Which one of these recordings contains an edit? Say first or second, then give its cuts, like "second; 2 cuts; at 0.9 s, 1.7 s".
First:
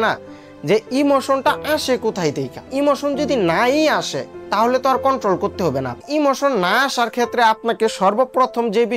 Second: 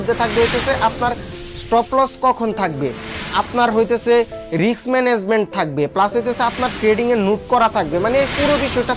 first; 2 cuts; at 2.7 s, 6.0 s